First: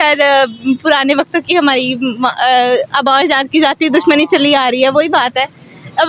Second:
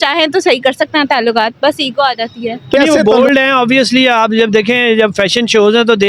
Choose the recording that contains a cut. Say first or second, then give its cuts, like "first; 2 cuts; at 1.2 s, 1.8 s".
second; 1 cut; at 2.8 s